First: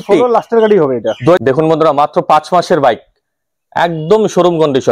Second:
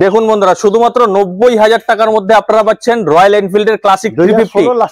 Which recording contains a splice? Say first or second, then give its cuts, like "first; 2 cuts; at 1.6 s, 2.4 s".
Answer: first; 1 cut; at 1.4 s